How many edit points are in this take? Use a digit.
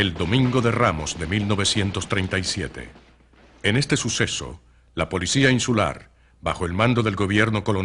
1